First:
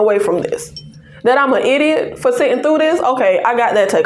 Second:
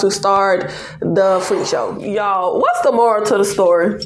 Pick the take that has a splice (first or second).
second